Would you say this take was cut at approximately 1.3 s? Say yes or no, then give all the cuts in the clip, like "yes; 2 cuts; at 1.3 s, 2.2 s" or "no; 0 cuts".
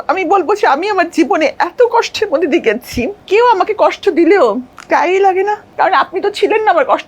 no; 3 cuts; at 3.2 s, 4.7 s, 5.6 s